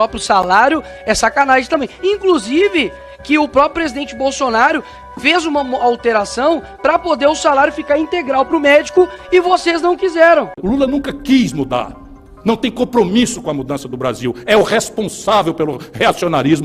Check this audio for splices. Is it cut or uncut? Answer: cut